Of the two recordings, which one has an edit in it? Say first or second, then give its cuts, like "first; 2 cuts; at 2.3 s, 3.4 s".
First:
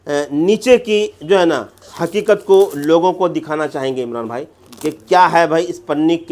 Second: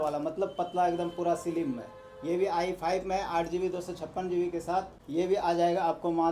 second; 1 cut; at 5.0 s